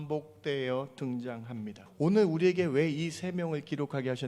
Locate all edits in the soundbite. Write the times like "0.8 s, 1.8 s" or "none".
1.8 s